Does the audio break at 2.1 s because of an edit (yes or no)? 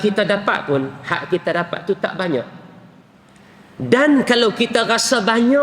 no